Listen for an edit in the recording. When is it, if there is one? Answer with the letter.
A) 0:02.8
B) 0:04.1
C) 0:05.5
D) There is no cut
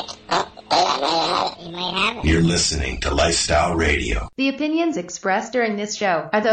B